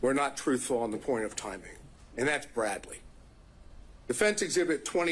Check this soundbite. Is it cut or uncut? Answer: cut